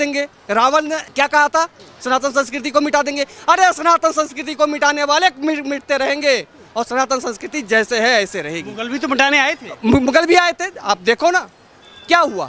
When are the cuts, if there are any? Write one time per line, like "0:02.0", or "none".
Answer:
none